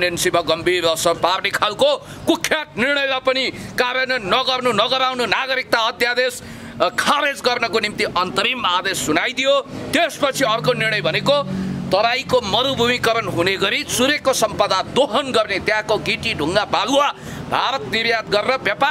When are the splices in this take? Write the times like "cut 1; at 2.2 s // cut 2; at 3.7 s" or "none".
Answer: none